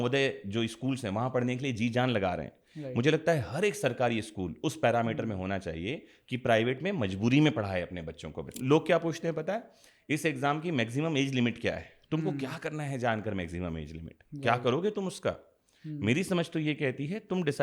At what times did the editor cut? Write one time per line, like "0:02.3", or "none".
0:08.6